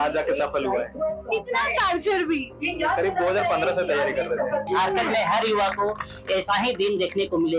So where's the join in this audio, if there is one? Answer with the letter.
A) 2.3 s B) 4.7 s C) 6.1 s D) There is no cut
B